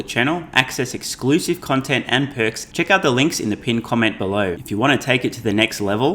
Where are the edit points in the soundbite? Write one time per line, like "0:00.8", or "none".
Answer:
0:02.6
0:04.6